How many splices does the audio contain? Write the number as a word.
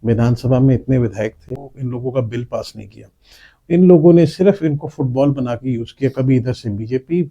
one